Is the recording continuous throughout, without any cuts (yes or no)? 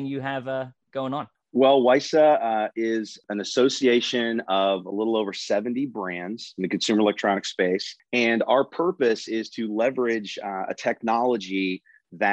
no